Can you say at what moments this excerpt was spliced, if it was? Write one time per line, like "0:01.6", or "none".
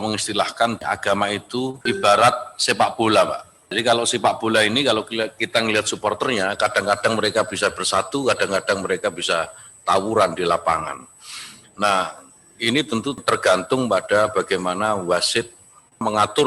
0:00.8
0:01.8
0:03.7

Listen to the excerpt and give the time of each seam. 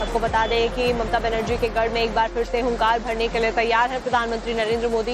0:02.3

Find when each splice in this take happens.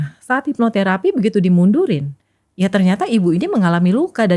none

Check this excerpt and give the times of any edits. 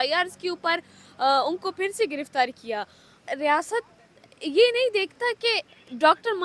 0:03.2

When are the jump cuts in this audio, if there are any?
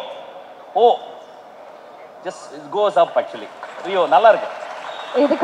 none

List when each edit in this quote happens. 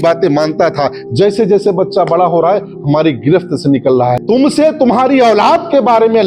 0:04.2

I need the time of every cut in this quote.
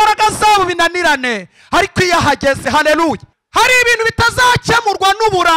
0:03.3

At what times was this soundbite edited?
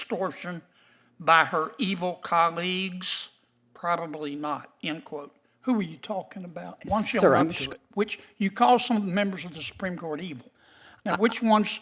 0:07.6

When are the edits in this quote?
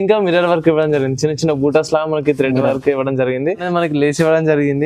0:03.6

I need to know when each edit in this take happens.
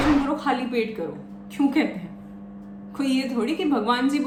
none

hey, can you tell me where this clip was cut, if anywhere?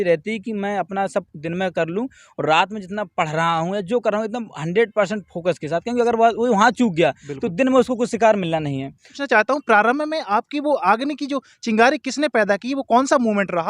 0:09.1

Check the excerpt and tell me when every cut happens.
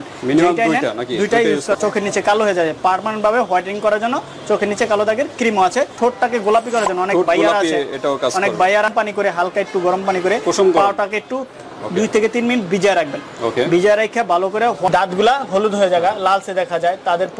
0:01.8
0:05.9
0:08.9
0:14.9

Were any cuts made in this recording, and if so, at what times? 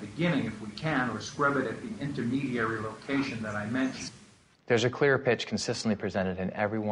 0:04.0

